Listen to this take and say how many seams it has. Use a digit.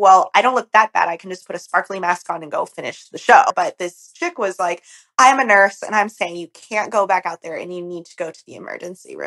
1